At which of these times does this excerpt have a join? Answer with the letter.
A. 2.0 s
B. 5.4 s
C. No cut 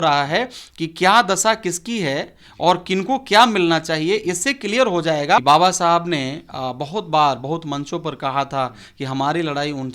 B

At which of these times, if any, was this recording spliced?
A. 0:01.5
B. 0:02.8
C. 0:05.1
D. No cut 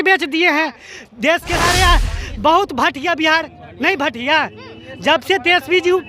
A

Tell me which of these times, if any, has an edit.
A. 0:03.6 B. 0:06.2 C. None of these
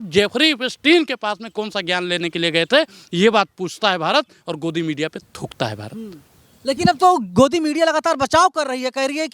C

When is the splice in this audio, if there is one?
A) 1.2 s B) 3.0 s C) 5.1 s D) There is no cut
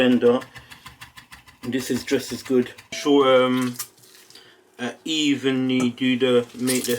B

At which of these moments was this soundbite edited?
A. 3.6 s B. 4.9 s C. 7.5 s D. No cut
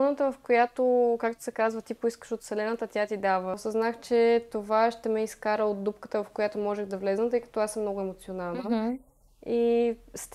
A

